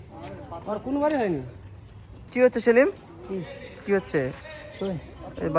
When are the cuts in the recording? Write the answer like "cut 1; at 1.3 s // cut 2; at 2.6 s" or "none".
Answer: none